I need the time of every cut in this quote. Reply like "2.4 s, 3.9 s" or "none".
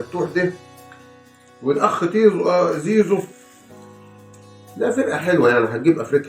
3.4 s, 4.7 s